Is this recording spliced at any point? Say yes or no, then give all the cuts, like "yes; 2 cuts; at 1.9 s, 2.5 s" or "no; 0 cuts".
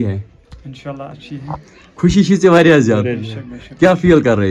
no; 0 cuts